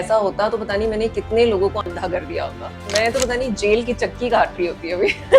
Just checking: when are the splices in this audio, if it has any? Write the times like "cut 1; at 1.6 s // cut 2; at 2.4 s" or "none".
cut 1; at 2.9 s